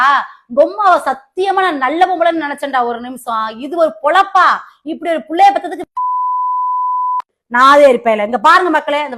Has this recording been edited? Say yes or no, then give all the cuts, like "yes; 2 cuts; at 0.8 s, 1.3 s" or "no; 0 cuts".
yes; 1 cut; at 7.3 s